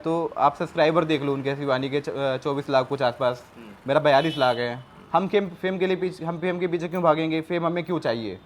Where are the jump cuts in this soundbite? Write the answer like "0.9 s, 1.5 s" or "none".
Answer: none